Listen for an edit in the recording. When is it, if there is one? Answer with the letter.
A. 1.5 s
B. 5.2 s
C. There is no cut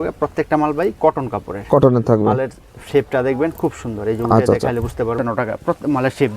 B